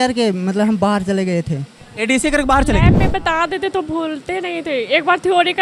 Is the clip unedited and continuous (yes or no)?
no